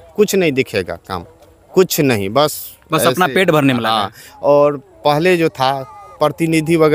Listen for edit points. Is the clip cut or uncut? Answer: uncut